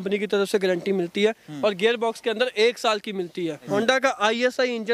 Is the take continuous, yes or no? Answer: no